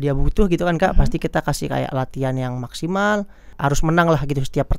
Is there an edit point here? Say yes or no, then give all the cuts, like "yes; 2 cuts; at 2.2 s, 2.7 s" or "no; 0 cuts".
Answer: yes; 1 cut; at 3.5 s